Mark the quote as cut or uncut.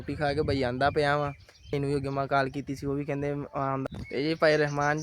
cut